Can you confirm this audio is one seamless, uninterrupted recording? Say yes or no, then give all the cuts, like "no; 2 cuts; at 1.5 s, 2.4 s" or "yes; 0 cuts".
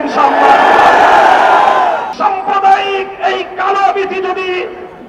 no; 1 cut; at 2.1 s